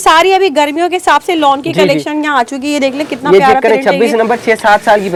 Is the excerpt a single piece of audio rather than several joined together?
yes; 0 cuts

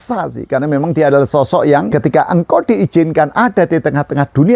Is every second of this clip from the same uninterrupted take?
no; 1 cut; at 1.9 s

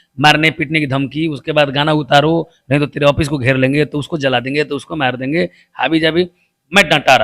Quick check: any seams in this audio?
no; 0 cuts

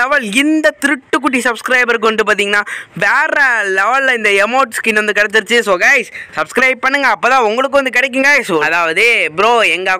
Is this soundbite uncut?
no; 1 cut; at 8.6 s

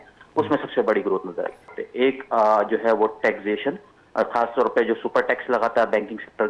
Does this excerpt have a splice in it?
yes; 1 cut; at 1.7 s

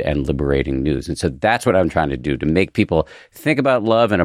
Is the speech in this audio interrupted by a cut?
no; 0 cuts

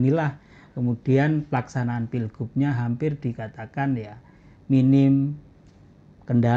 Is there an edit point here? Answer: no; 0 cuts

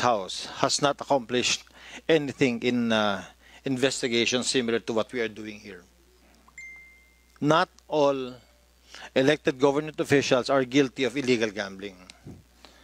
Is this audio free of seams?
yes; 0 cuts

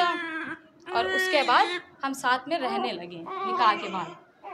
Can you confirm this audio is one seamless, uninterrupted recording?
yes; 0 cuts

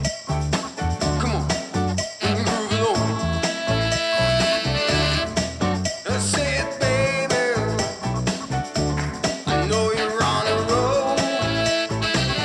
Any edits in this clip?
no; 0 cuts

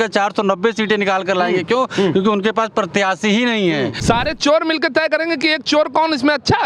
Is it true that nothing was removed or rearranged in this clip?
no; 1 cut; at 4.0 s

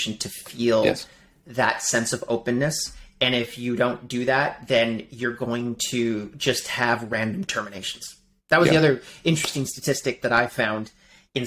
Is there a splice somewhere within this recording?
no; 0 cuts

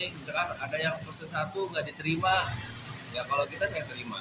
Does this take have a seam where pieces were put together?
no; 0 cuts

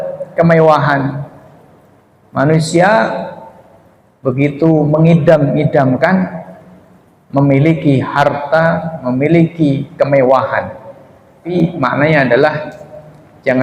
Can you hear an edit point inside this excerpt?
yes; 1 cut; at 11.5 s

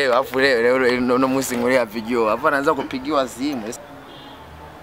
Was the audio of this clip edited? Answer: yes; 1 cut; at 3.7 s

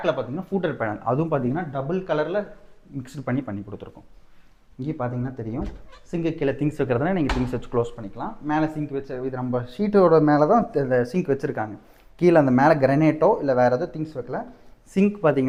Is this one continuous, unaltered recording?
yes; 0 cuts

